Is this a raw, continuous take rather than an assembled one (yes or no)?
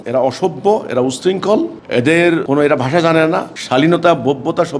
yes